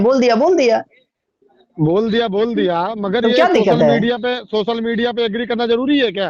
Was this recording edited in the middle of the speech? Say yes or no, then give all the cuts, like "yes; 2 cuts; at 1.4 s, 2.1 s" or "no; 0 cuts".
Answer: no; 0 cuts